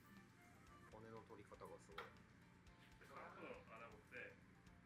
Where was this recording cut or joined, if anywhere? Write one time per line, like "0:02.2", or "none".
0:00.9
0:02.9